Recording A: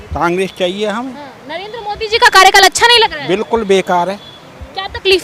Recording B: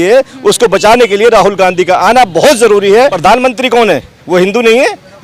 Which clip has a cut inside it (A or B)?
B